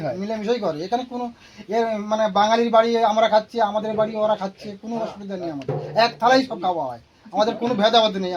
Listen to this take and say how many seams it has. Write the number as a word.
zero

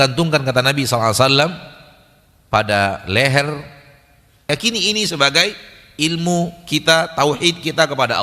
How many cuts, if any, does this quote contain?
one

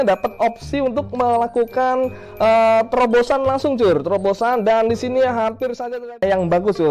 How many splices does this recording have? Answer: one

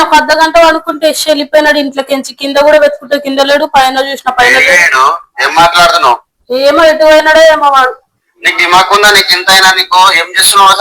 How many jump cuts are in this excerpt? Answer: zero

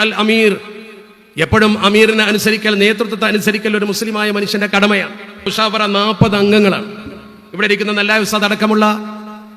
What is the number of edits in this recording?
one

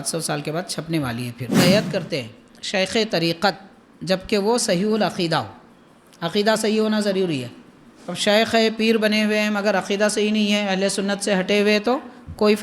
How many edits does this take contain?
one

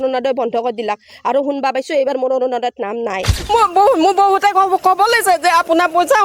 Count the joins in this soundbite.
one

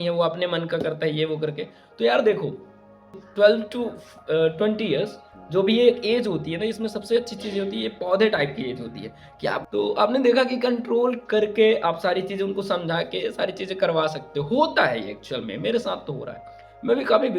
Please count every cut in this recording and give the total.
two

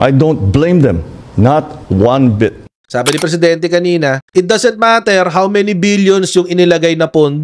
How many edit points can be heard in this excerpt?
one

